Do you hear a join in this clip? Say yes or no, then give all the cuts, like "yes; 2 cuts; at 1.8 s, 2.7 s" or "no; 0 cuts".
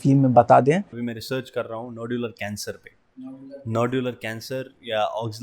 yes; 1 cut; at 1.0 s